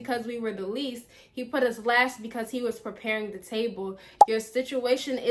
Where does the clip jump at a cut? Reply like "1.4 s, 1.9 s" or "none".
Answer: none